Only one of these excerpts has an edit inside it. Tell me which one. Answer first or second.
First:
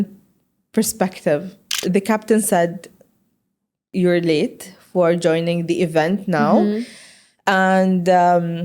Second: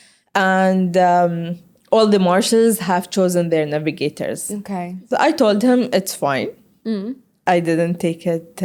first